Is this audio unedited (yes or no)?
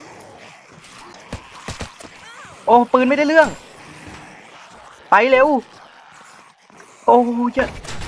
no